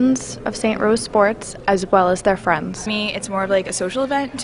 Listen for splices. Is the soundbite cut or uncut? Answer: uncut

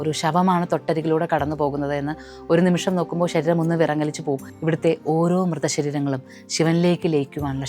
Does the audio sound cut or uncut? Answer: cut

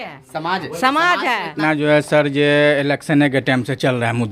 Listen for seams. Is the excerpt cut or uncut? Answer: cut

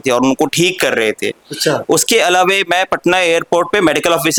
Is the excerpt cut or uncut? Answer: uncut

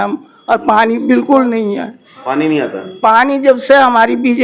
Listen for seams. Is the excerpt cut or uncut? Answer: uncut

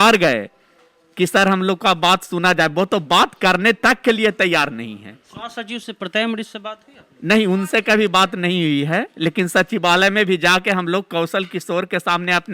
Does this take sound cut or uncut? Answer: uncut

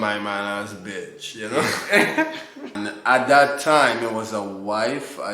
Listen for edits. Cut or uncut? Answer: cut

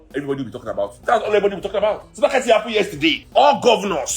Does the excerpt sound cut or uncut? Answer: cut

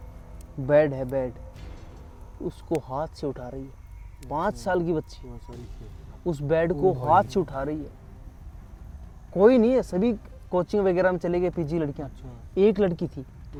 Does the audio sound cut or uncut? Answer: uncut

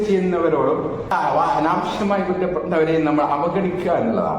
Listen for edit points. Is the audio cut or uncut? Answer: cut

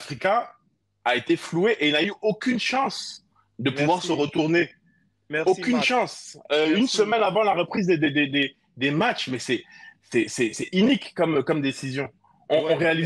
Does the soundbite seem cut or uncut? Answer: uncut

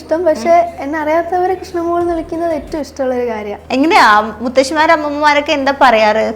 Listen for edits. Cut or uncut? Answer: cut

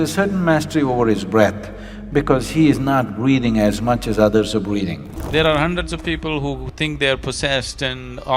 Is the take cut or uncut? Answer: cut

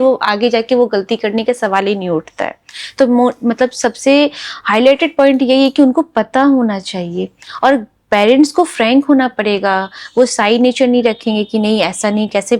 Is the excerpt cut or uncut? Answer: uncut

